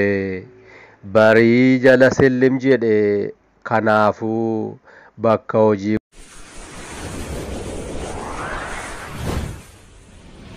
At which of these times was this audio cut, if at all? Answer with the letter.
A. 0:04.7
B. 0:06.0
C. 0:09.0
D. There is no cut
B